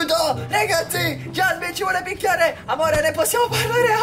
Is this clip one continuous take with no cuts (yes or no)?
yes